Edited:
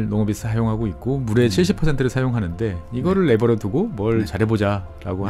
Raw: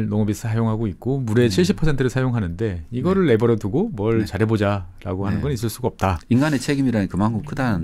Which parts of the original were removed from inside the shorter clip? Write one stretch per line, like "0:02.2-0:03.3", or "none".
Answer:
none